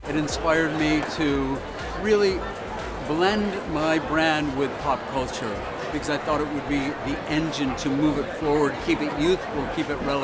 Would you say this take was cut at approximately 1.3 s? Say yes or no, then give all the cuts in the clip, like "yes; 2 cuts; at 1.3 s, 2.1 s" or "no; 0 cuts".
no; 0 cuts